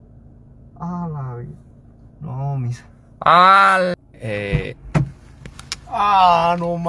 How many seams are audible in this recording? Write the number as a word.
one